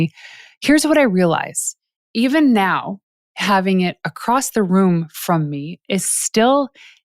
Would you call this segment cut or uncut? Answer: cut